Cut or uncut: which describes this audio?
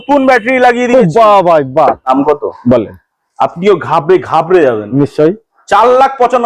cut